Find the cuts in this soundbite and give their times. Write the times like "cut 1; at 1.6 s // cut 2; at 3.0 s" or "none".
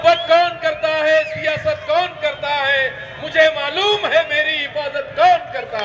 none